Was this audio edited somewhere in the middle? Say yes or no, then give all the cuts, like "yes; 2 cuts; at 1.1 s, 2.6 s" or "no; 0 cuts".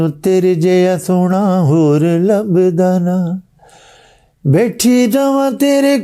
no; 0 cuts